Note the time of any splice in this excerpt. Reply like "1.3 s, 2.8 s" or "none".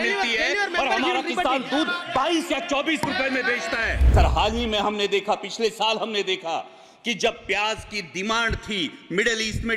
4.0 s